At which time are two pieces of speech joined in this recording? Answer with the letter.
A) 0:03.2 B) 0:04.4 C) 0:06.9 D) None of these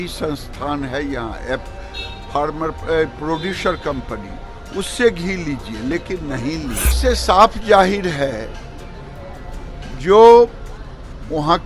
C